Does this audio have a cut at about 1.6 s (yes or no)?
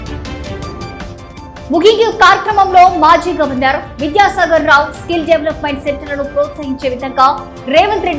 yes